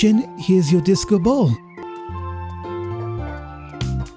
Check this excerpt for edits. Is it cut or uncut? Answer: cut